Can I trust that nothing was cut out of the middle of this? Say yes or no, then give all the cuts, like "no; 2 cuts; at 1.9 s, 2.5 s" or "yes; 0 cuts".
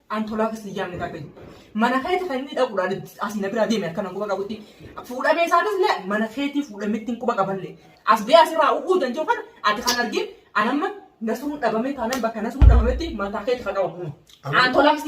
no; 2 cuts; at 1.5 s, 7.9 s